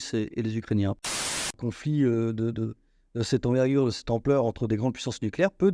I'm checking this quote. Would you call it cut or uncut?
cut